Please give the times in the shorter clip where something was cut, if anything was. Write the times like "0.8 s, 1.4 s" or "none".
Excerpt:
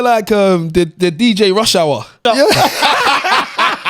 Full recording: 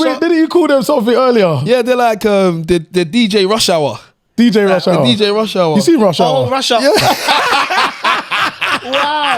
2.1 s